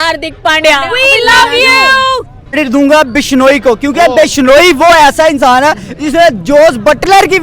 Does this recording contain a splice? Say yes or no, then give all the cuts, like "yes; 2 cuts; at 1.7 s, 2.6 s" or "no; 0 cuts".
yes; 1 cut; at 2.6 s